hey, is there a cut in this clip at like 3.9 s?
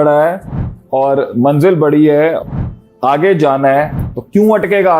no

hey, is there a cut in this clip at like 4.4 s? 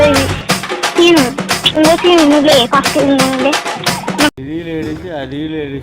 yes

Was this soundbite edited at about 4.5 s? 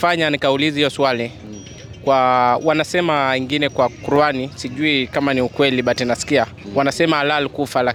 no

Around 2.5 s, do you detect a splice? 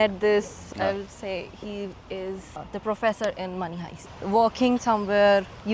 yes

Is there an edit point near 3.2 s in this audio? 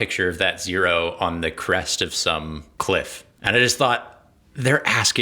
yes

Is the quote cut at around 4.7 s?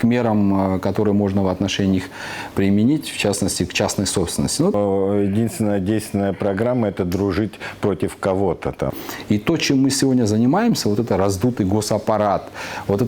yes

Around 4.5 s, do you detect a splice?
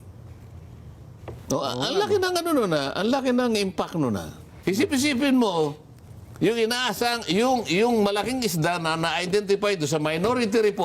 yes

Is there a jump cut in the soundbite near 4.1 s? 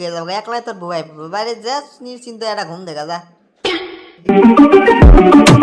yes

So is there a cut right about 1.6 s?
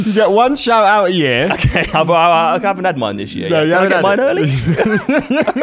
yes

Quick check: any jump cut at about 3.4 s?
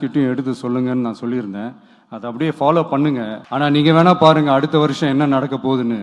yes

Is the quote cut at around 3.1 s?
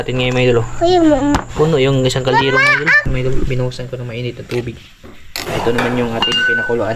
yes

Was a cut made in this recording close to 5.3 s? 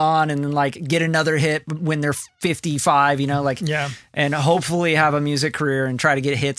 no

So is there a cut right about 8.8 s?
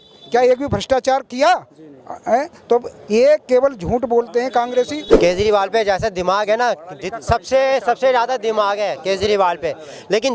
no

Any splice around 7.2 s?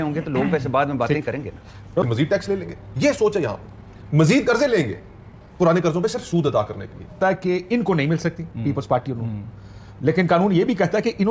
yes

